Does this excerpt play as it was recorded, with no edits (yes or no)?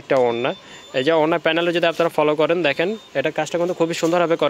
yes